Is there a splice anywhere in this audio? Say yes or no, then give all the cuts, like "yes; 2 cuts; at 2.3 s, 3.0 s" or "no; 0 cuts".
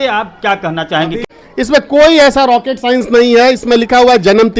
yes; 1 cut; at 1.3 s